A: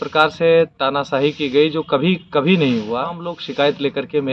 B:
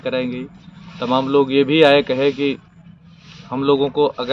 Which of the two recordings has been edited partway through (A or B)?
A